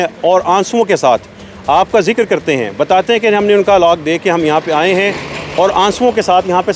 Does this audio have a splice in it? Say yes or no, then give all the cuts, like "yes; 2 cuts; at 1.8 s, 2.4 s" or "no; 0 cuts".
no; 0 cuts